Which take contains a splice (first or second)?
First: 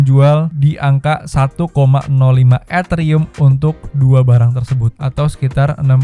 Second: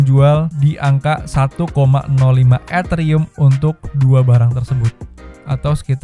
first